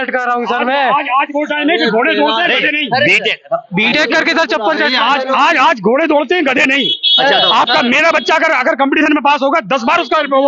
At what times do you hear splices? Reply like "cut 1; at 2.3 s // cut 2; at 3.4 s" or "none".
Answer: none